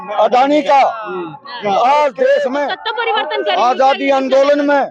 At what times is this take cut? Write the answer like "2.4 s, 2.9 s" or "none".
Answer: 2.8 s